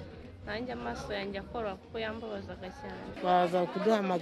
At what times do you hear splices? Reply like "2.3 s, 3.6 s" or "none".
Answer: 3.1 s